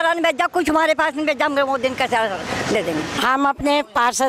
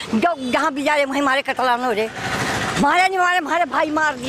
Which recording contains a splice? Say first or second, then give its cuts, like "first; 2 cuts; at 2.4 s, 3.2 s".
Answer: first; 1 cut; at 3.1 s